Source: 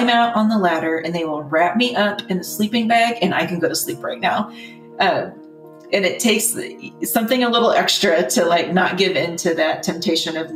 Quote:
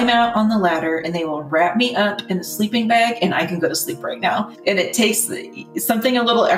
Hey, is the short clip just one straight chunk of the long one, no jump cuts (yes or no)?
no